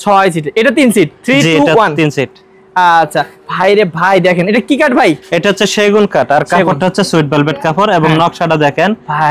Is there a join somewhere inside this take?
no; 0 cuts

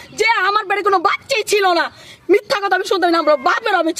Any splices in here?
no; 0 cuts

